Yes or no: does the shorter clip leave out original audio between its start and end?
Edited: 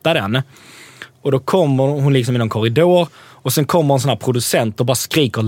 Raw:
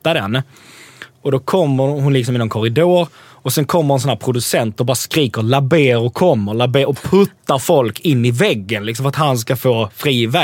no